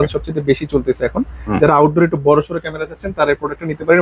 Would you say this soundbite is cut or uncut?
uncut